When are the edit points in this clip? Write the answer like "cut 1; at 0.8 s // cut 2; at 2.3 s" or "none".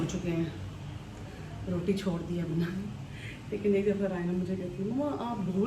none